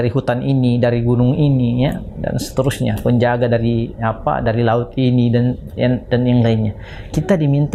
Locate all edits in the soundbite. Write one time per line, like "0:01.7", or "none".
none